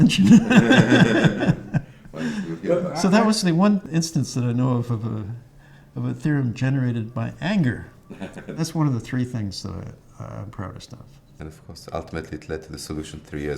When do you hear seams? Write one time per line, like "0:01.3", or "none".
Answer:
0:03.9
0:08.6
0:11.2